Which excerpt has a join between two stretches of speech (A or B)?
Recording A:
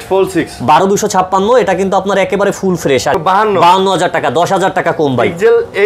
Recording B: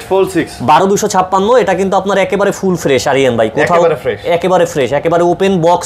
A